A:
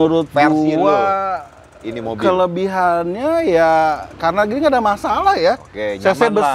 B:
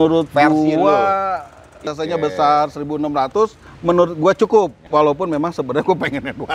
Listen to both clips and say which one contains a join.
B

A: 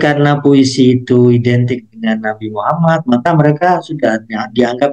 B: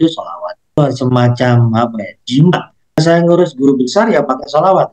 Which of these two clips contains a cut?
B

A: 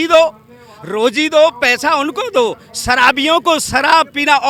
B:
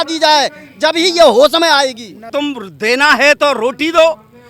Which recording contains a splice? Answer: B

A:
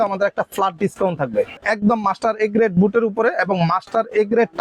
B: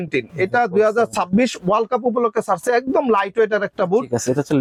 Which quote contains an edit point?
A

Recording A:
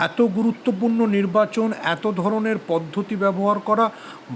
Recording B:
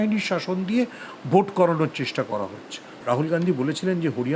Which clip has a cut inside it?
B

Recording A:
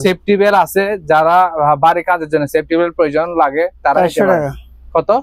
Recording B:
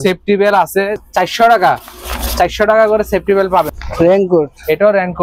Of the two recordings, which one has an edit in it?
B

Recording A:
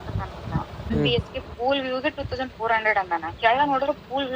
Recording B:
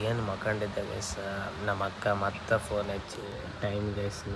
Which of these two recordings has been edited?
A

